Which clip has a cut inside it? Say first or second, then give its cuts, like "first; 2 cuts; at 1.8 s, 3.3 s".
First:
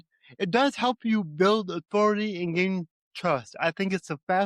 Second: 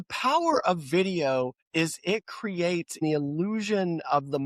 second; 2 cuts; at 1.6 s, 3.0 s